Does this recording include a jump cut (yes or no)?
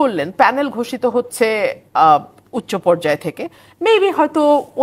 no